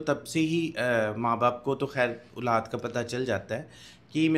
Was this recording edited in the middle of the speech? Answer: no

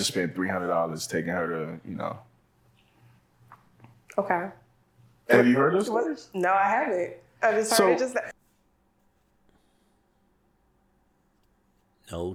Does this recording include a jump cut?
no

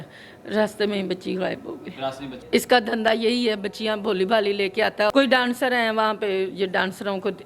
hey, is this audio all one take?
no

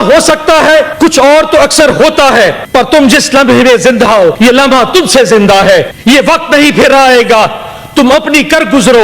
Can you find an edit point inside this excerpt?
yes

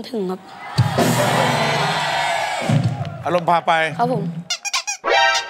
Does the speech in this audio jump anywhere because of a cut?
yes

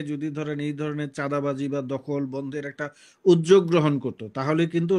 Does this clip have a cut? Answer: no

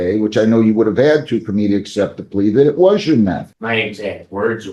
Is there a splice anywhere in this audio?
yes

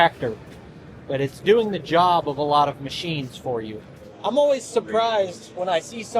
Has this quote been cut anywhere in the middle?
yes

